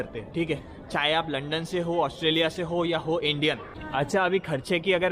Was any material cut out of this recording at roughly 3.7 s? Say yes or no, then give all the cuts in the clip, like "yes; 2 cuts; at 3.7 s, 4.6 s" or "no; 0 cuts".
yes; 1 cut; at 3.7 s